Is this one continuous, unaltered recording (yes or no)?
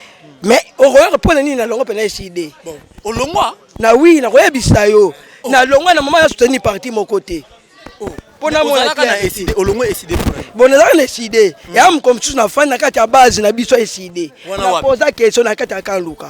yes